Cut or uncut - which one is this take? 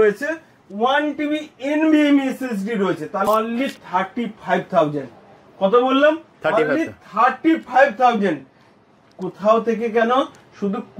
cut